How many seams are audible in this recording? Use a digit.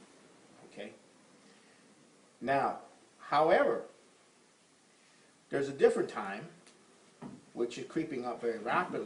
0